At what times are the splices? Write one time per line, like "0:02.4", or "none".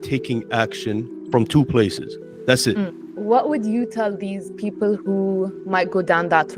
0:01.2
0:03.0
0:05.6